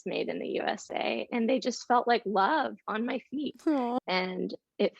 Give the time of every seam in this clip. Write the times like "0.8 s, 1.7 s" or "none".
4.0 s